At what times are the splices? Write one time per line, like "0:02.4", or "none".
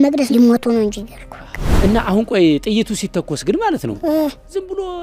0:01.7